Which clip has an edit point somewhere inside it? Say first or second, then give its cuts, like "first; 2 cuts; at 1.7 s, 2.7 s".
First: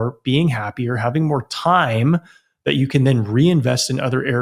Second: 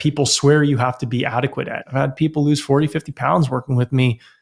second; 1 cut; at 1.8 s